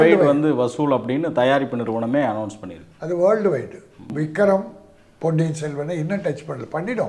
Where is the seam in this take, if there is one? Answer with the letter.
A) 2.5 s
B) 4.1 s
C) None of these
B